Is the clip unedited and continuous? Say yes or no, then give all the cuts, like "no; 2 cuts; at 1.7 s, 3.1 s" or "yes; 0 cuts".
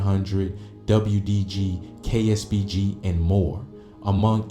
no; 1 cut; at 2.7 s